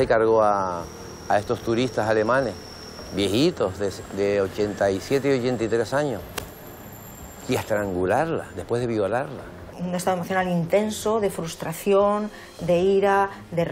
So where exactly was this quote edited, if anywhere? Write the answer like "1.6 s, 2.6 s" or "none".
9.7 s

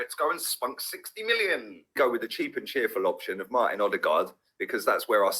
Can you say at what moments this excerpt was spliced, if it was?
2.0 s

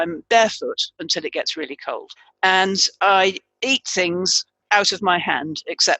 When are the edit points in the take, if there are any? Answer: 2.2 s

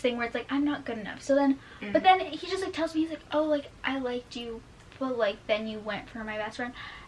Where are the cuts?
none

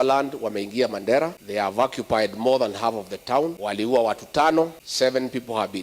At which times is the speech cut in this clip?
1.4 s, 3.6 s, 4.8 s

